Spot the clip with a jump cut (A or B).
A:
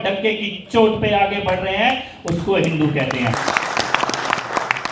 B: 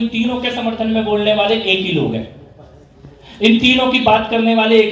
A